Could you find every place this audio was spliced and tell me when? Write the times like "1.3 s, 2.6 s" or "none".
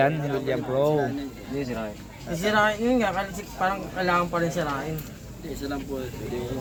none